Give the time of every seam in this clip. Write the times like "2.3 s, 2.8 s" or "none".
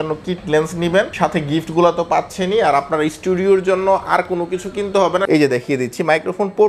5.2 s